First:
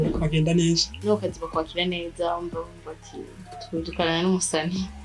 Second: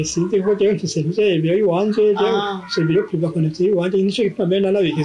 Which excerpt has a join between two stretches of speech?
first; 1 cut; at 0.9 s

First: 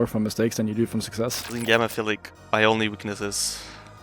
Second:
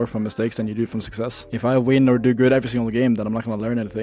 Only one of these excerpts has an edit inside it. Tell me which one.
first; 2 cuts; at 1.5 s, 2.3 s

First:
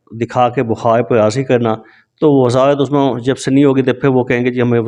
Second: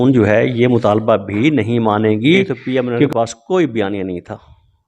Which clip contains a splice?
second; 1 cut; at 2.5 s

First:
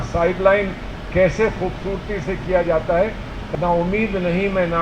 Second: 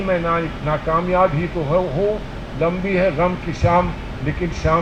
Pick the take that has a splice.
first; 1 cut; at 3.4 s

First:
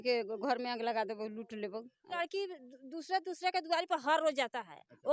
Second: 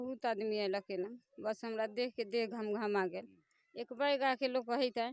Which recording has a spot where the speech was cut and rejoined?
first; 1 cut; at 2.2 s

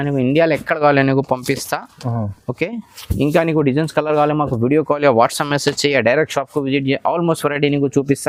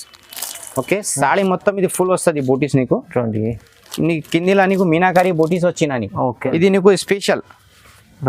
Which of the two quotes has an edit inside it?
second; 1 cut; at 6.4 s

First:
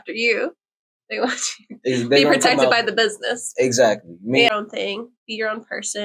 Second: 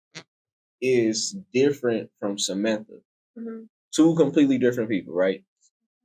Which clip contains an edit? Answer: first; 1 cut; at 4.5 s

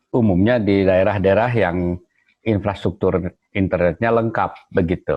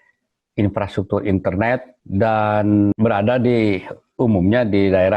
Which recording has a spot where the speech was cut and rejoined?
second; 2 cuts; at 2.0 s, 2.9 s

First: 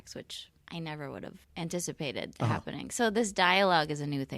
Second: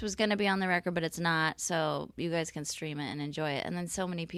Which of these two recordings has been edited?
first; 1 cut; at 1.4 s

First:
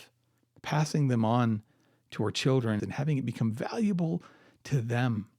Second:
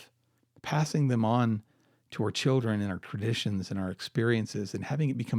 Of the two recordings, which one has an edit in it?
first; 1 cut; at 2.8 s

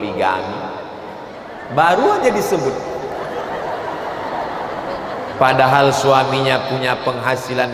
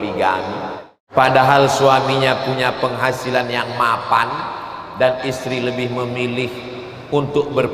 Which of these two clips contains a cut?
second; 1 cut; at 1.0 s

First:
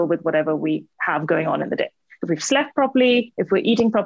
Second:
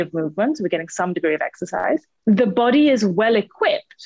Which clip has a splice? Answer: second; 1 cut; at 2.1 s

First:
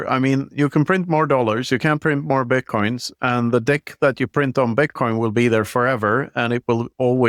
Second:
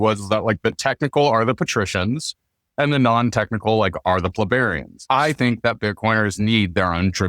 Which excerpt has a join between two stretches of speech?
second; 1 cut; at 4.9 s

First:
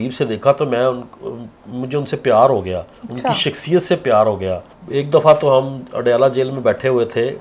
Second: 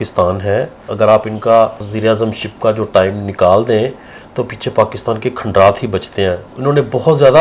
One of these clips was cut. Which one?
second; 3 cuts; at 0.9 s, 1.9 s, 6.5 s

